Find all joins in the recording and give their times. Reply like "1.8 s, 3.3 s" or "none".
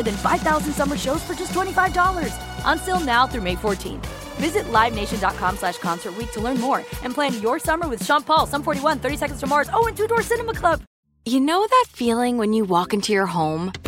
10.9 s